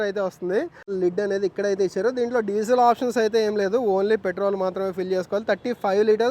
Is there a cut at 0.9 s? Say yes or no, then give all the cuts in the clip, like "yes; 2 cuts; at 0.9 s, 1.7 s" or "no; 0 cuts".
yes; 1 cut; at 0.9 s